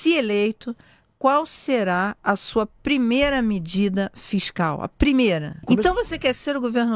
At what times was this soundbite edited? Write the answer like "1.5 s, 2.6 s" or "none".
5.7 s